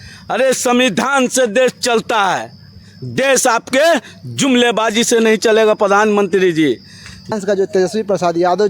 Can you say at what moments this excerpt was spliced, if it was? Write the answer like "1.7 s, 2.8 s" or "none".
7.4 s